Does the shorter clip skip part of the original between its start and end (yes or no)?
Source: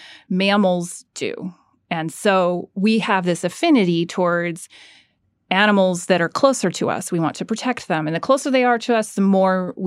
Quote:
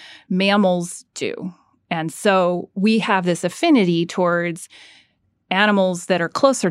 no